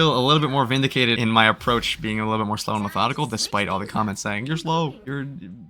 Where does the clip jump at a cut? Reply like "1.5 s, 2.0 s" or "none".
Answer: 1.2 s